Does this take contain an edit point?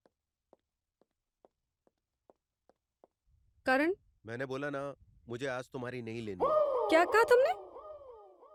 no; 0 cuts

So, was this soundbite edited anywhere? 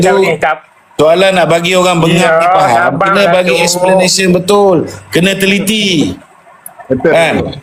no; 0 cuts

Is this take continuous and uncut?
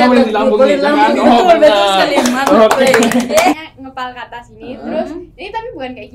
no; 1 cut; at 3.6 s

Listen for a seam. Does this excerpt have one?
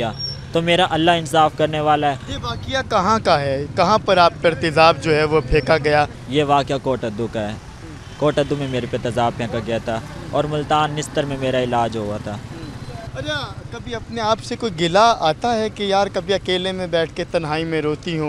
no; 0 cuts

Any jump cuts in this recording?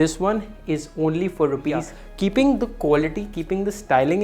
yes; 1 cut; at 2.0 s

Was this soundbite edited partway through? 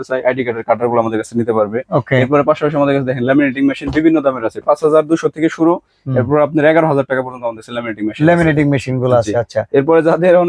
no; 0 cuts

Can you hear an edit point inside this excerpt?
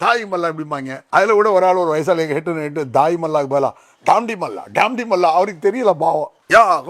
yes; 1 cut; at 1.0 s

